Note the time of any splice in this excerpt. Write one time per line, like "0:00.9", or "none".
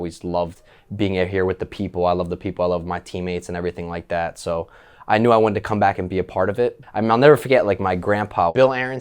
0:06.8